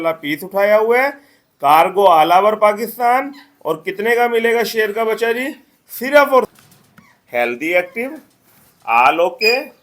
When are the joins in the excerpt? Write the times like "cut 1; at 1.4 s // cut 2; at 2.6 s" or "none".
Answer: cut 1; at 6.5 s